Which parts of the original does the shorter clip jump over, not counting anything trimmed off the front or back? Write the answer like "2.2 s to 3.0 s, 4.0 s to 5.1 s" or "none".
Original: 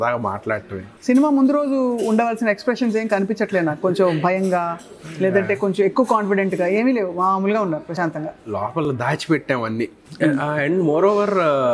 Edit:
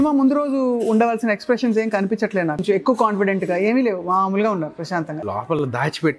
3.8 s to 5.7 s, 8.0 s to 8.1 s